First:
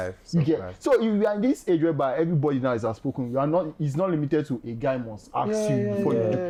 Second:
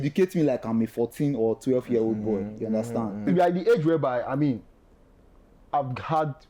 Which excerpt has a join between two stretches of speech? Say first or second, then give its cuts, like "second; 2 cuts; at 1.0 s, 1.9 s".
second; 1 cut; at 3.3 s